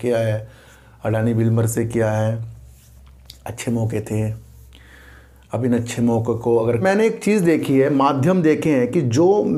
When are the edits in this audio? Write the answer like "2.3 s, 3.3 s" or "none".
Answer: 6.8 s